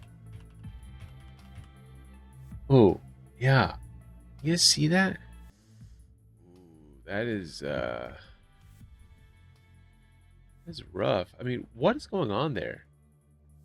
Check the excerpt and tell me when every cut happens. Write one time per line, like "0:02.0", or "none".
0:05.4